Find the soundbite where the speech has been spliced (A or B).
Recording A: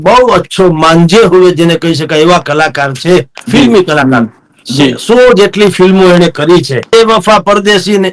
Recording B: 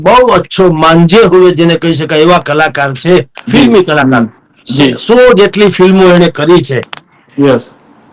A